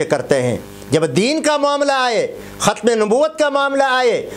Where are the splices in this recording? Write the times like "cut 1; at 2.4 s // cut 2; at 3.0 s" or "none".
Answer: none